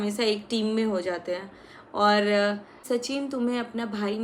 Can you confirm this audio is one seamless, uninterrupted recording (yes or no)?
no